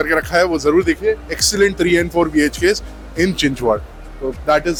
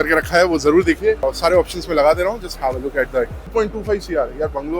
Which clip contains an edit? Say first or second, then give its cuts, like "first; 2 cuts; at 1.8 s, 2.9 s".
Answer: second; 2 cuts; at 1.2 s, 3.4 s